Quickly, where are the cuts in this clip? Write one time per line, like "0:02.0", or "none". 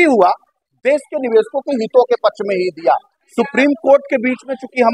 0:03.2